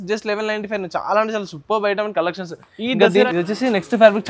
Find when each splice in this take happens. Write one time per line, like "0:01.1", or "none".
0:03.3